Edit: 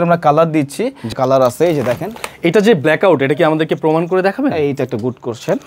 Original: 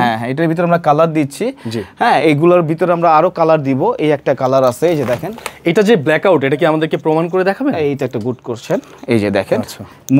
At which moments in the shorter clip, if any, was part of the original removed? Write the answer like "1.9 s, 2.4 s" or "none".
1.2 s